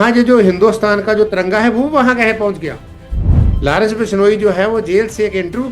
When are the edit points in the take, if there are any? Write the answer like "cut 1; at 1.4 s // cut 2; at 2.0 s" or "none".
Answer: cut 1; at 3.2 s